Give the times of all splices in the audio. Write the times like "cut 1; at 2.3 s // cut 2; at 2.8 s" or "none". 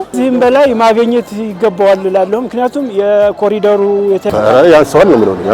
cut 1; at 4.3 s